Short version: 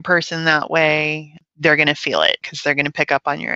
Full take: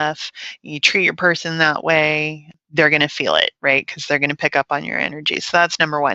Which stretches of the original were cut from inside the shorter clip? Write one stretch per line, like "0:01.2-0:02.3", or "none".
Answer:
0:03.6-0:03.9

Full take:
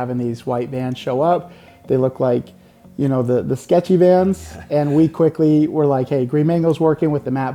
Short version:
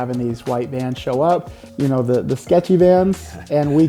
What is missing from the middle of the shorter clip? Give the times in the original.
0:01.6-0:02.8

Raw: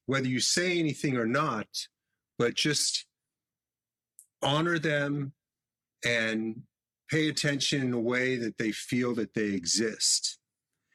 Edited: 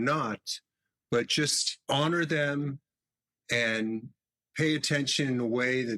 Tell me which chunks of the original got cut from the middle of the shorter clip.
0:02.9-0:04.2

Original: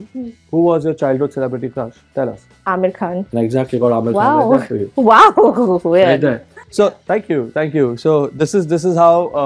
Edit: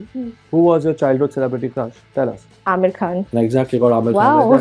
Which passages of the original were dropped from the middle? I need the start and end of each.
none

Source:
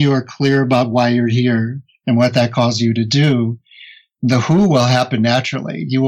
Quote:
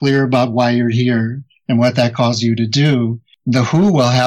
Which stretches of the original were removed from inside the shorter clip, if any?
0:03.7-0:04.0

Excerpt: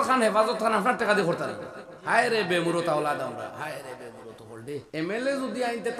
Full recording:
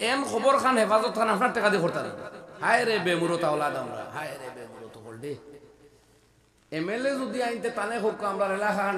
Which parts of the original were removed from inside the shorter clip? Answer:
0:05.4-0:06.6

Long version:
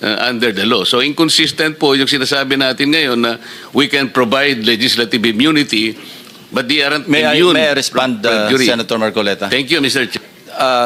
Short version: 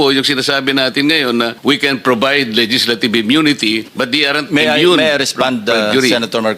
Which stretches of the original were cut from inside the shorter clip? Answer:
0:03.4-0:03.6
0:06.0-0:06.5

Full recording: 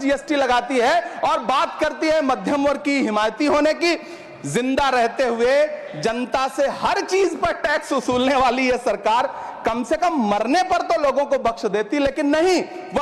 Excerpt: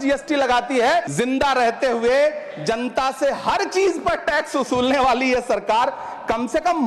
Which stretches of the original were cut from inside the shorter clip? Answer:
0:01.1-0:04.5

